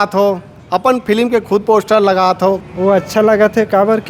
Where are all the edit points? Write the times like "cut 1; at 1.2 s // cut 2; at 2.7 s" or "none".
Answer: none